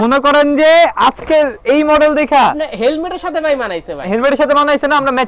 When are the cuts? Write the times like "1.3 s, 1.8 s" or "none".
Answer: none

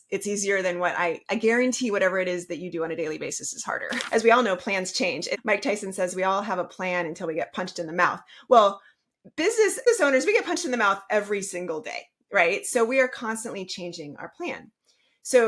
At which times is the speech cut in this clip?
4.0 s, 5.3 s, 9.9 s

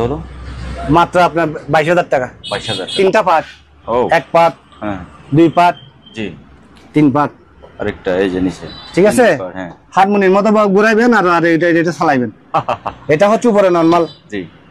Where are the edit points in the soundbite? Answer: 2.9 s

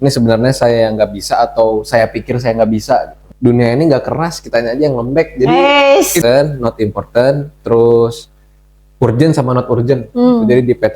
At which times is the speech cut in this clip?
3.2 s, 6.2 s

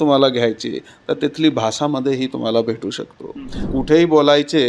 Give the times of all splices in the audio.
3.7 s

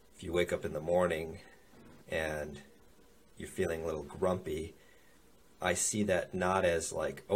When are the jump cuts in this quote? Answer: none

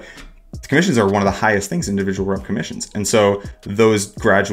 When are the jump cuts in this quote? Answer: none

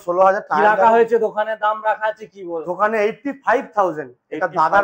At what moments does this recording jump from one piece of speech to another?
none

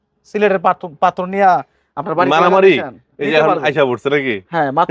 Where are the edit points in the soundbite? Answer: none

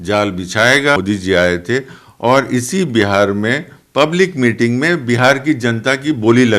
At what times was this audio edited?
1.0 s

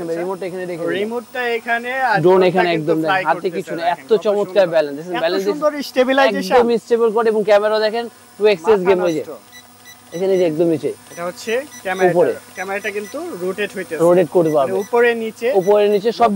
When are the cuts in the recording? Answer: none

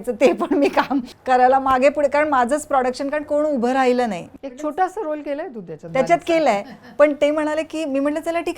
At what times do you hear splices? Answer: 1.1 s, 4.3 s

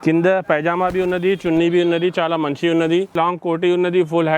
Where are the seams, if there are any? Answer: 3.1 s

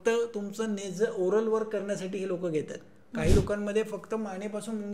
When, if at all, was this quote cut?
3.0 s

